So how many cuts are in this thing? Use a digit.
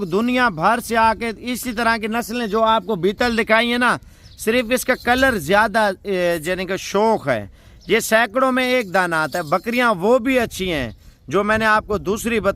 0